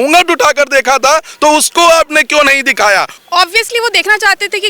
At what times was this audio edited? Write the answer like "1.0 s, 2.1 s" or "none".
3.1 s